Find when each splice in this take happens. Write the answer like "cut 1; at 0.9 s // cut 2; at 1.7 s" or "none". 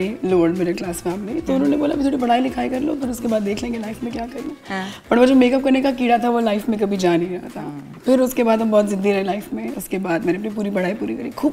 none